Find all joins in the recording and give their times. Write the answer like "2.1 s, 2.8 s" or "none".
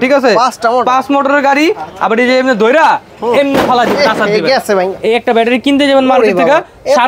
4.9 s